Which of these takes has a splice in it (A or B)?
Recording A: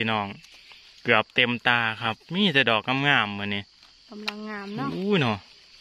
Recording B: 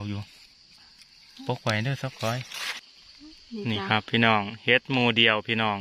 B